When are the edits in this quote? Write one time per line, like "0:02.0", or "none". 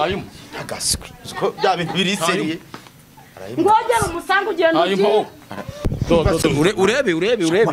0:06.0